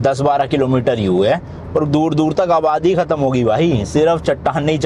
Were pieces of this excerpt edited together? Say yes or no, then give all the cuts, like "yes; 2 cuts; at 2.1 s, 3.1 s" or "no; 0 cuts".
no; 0 cuts